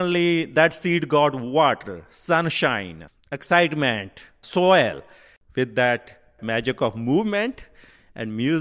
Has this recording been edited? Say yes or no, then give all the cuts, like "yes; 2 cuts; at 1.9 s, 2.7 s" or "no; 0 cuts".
yes; 1 cut; at 6.4 s